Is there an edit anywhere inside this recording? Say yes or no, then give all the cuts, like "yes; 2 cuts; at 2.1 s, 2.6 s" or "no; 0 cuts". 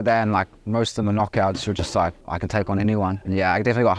yes; 2 cuts; at 2.2 s, 3.2 s